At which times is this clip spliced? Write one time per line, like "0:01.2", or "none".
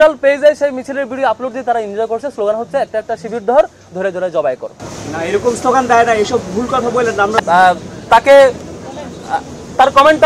0:07.4